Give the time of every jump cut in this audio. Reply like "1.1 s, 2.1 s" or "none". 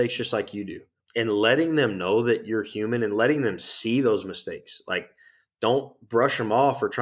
0.9 s